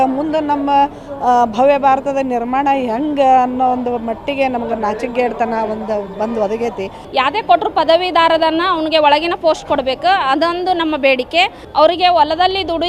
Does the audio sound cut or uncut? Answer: cut